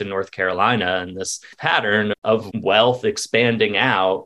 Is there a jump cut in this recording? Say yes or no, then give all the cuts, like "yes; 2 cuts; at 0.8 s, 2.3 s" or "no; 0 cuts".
yes; 2 cuts; at 1.6 s, 2.5 s